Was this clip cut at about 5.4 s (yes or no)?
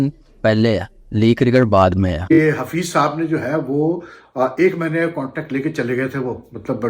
no